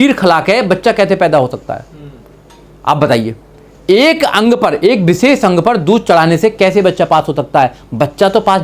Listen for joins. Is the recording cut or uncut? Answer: uncut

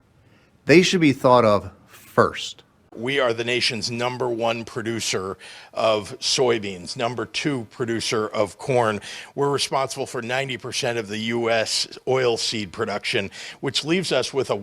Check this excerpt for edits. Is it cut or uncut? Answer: cut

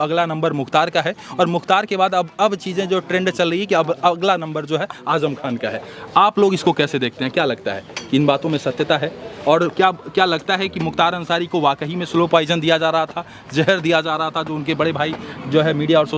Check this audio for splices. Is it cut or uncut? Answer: uncut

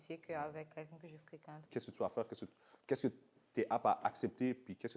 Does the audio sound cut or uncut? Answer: cut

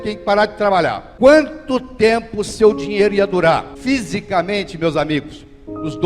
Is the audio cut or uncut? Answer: cut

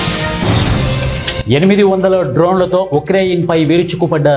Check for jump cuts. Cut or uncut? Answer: uncut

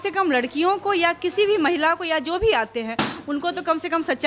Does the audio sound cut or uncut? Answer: uncut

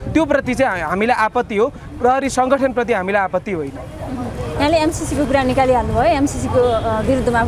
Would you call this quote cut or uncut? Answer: uncut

